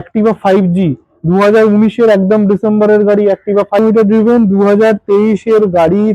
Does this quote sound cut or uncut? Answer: cut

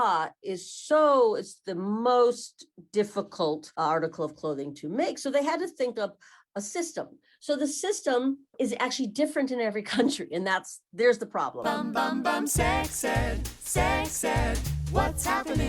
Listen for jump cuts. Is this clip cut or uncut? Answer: cut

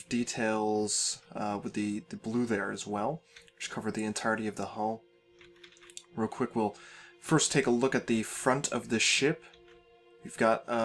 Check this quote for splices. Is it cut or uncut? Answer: cut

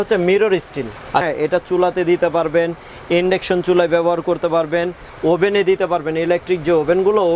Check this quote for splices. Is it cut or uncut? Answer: cut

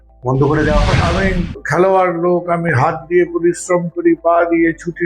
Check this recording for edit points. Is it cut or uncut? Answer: cut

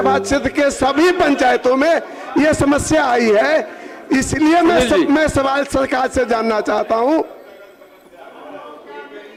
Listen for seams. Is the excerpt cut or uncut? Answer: uncut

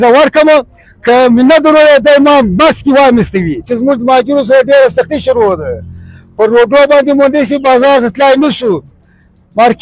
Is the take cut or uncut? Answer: cut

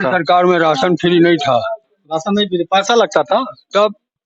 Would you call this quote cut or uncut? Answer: uncut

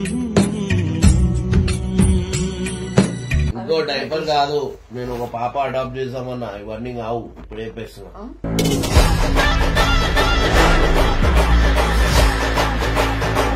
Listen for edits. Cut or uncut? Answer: cut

